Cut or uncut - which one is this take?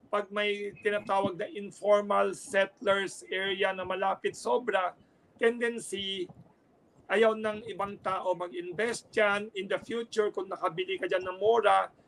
uncut